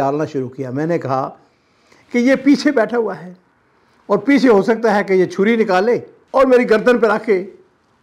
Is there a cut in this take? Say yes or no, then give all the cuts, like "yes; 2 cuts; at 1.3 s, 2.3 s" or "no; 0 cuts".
no; 0 cuts